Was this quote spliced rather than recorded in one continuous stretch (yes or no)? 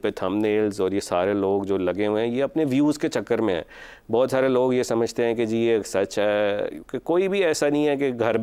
no